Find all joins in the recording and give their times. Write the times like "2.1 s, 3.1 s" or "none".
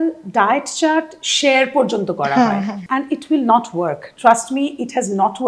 2.8 s